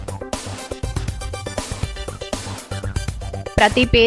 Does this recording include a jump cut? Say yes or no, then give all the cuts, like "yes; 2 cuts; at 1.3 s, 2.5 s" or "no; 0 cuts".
no; 0 cuts